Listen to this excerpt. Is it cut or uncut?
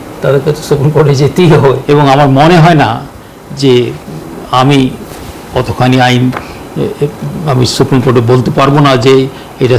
cut